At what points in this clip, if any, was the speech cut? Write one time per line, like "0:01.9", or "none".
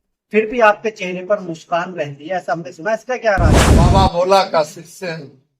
0:03.6